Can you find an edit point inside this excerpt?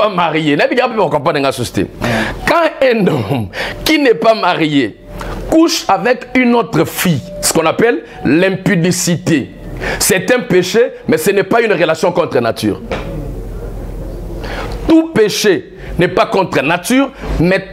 no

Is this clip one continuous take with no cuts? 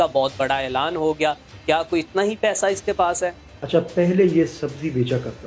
no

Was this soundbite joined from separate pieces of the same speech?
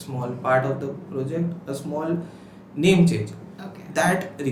no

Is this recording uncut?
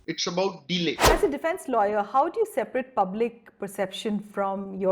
no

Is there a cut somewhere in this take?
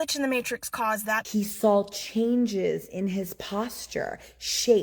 yes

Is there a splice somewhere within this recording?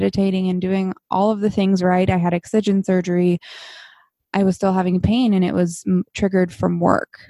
no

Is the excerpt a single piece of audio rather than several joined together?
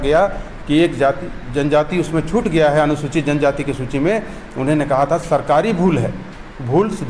yes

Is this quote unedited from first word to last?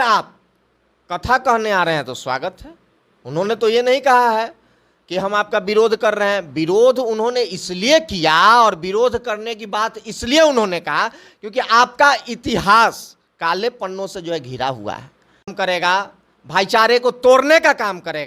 no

